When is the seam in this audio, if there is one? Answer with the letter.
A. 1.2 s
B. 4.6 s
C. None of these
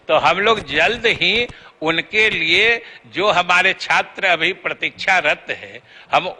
C